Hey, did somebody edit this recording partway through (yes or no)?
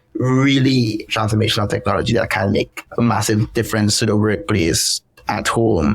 yes